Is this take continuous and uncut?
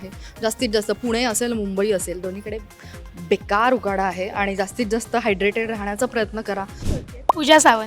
no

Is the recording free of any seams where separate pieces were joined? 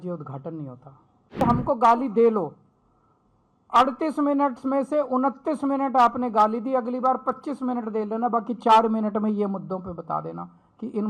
no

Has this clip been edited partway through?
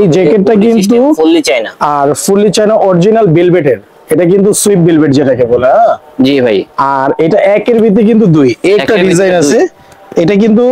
no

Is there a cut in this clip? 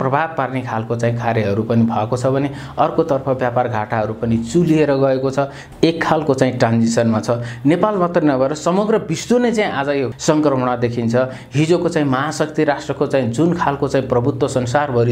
yes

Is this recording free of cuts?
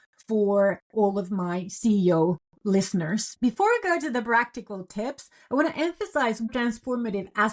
no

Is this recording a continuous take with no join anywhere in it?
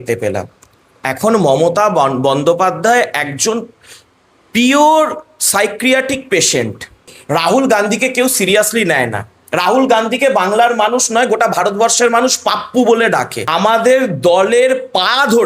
no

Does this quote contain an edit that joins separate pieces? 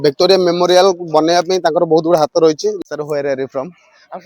yes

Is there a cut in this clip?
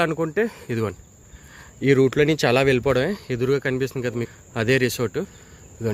no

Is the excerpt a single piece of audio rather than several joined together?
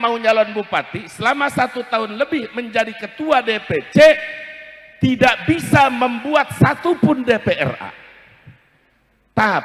yes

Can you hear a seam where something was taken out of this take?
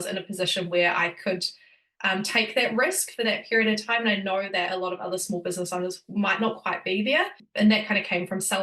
yes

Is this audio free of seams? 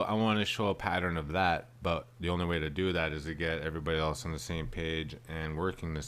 no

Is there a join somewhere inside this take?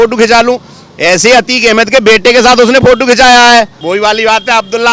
yes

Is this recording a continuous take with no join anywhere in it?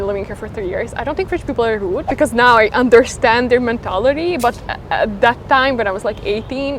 yes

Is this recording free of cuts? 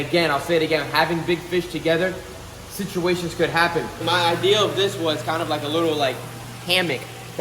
no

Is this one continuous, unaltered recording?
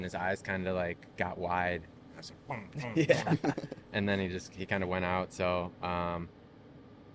yes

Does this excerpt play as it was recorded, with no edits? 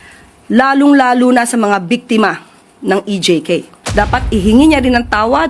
no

